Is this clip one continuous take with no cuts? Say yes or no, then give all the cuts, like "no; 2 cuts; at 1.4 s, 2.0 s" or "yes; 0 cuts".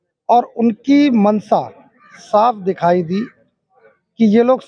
yes; 0 cuts